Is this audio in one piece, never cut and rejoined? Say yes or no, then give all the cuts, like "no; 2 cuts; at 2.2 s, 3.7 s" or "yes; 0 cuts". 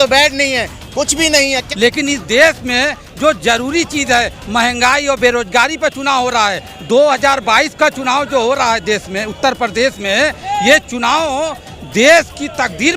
no; 1 cut; at 1.6 s